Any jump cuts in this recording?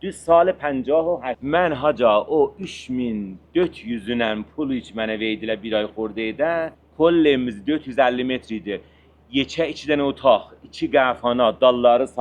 yes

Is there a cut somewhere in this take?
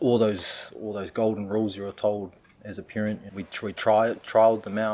yes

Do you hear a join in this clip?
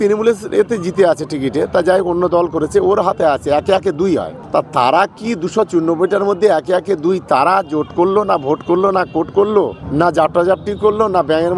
no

